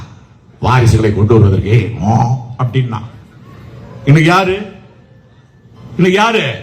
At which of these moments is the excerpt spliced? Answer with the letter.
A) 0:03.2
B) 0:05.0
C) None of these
C